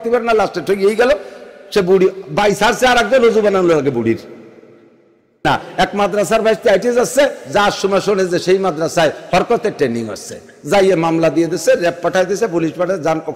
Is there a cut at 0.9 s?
no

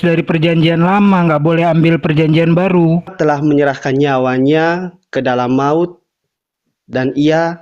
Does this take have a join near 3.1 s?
yes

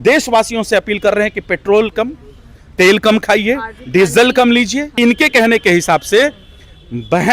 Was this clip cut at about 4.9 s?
yes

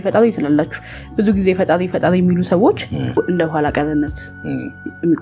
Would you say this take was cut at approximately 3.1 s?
yes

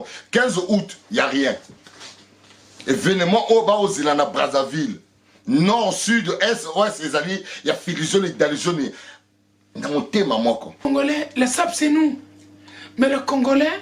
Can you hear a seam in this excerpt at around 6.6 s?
no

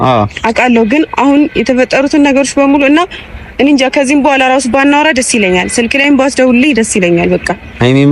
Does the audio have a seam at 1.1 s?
no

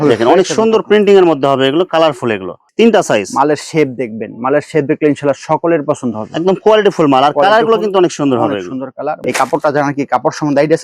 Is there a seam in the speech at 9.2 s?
yes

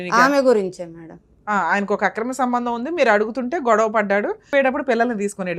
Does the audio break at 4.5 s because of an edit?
yes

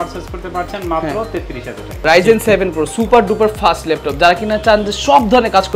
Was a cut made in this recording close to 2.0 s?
yes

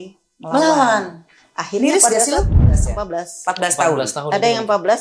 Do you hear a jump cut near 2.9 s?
yes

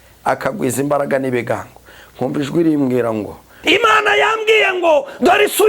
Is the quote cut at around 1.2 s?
no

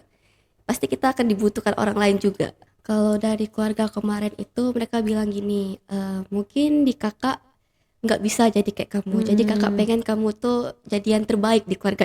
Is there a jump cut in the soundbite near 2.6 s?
yes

